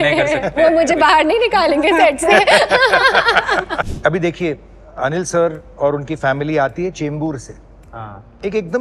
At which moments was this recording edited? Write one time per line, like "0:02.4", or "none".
0:03.9